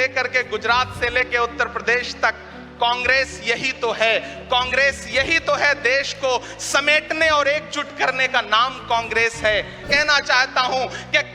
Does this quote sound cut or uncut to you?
cut